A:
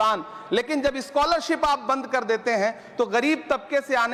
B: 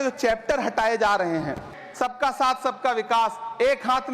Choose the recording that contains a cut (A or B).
B